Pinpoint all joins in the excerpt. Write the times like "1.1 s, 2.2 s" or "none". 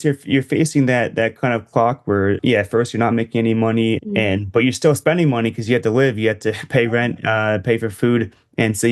2.4 s, 4.0 s